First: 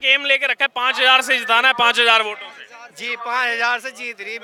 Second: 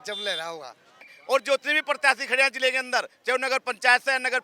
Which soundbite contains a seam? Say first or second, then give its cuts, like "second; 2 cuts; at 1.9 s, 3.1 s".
second; 1 cut; at 1.1 s